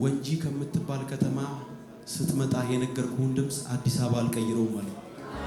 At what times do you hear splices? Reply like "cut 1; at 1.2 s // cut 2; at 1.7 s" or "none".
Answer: none

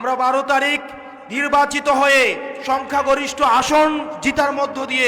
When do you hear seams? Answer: none

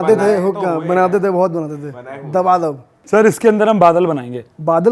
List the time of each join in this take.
cut 1; at 2.9 s

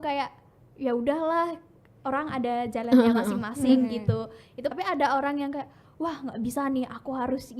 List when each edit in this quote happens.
cut 1; at 4.7 s

